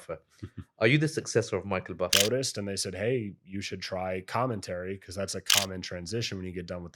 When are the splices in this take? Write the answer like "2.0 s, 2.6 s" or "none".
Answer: 2.1 s